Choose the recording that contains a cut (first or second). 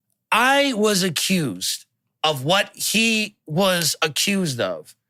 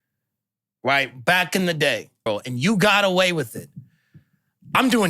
second